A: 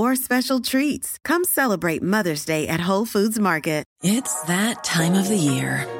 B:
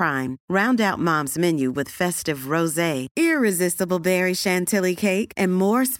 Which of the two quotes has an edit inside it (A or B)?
A